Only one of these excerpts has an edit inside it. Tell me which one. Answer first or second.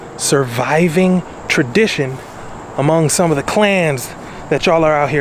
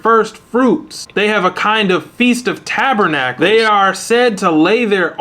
second